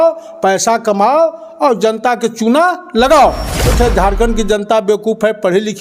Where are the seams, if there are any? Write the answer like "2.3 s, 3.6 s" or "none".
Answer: 3.7 s